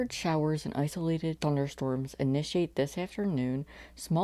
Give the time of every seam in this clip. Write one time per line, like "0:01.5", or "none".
0:01.4